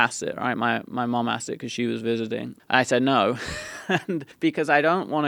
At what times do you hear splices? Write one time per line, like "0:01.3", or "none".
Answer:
0:02.5
0:04.3

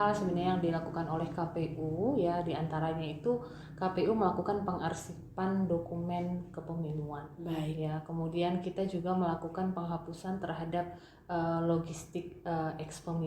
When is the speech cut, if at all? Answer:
none

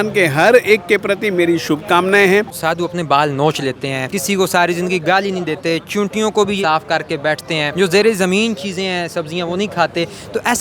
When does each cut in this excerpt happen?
0:02.6
0:04.1
0:06.6
0:07.7

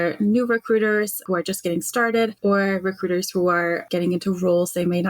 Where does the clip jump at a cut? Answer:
0:01.2
0:02.4
0:03.8

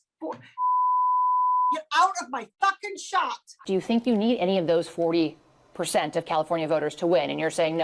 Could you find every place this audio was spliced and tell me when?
0:03.6

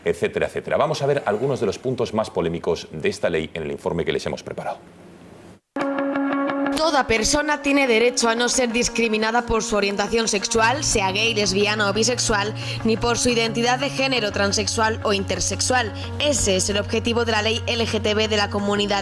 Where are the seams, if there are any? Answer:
0:04.9

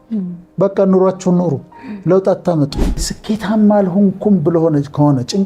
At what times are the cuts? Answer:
0:03.1

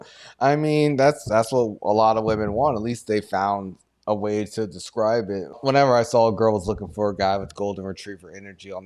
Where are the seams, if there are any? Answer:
0:05.6

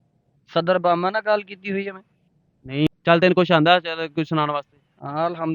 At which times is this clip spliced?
0:02.9

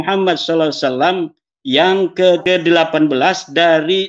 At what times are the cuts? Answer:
0:02.3

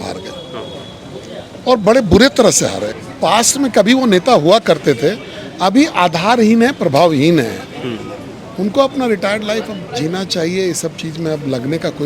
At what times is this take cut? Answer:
0:02.9

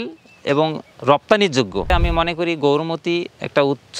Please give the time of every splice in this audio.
0:01.9

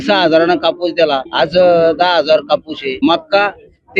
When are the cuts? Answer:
0:01.3
0:03.0

